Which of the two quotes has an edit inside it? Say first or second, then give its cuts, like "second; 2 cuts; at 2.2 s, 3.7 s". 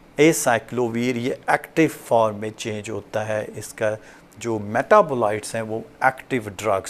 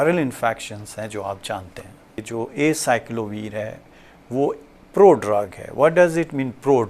second; 1 cut; at 2.3 s